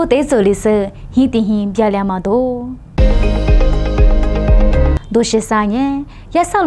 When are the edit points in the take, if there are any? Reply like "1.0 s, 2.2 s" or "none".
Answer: 2.9 s, 4.9 s